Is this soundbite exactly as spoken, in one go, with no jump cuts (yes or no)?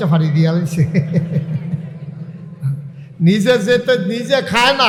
yes